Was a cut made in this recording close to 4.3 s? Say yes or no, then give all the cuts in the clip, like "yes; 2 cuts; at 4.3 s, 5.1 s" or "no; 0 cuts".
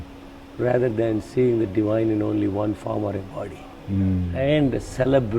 yes; 1 cut; at 4.3 s